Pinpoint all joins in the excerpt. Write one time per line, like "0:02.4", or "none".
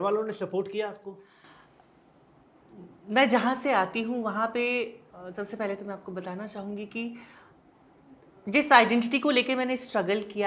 none